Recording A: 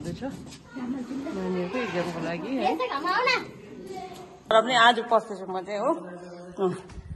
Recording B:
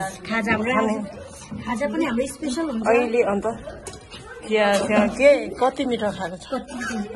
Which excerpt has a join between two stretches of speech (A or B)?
A